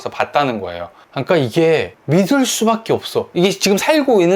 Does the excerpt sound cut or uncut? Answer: uncut